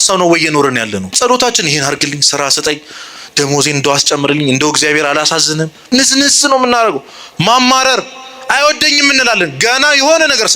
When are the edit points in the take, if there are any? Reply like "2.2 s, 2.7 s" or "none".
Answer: 1.1 s, 5.8 s